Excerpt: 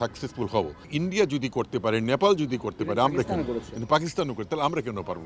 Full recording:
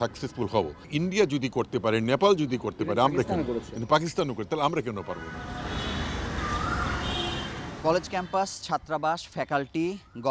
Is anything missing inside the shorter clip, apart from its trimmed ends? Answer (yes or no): no